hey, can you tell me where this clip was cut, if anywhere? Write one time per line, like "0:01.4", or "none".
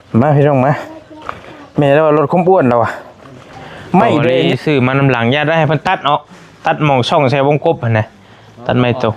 0:04.5

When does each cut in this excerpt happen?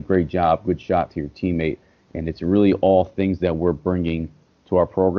none

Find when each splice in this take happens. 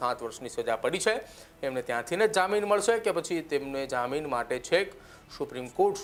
none

